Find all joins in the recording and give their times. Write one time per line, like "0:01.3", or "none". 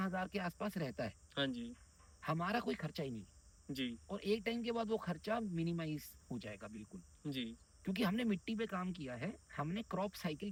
none